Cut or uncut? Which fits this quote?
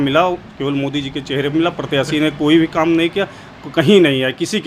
uncut